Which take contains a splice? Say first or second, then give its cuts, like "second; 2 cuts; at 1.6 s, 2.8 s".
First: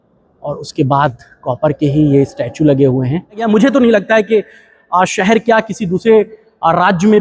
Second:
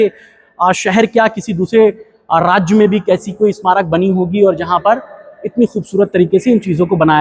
first; 1 cut; at 3.4 s